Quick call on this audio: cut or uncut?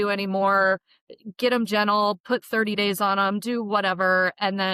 uncut